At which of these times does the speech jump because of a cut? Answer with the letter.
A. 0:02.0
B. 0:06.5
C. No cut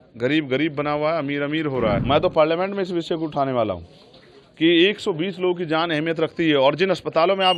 A